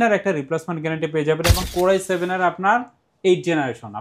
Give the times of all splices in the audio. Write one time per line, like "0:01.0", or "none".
0:01.6